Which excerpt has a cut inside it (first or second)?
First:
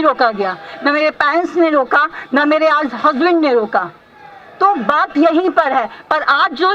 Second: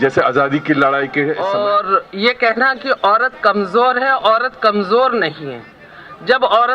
second